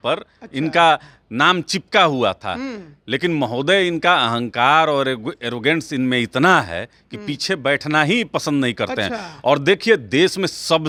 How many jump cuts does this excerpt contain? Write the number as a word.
zero